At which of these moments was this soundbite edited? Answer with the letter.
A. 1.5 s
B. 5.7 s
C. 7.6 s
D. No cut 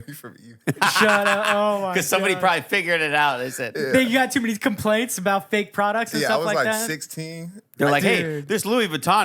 C